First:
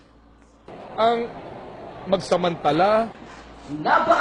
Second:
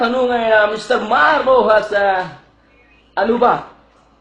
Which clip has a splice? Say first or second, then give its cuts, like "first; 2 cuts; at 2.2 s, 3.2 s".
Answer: second; 1 cut; at 3.1 s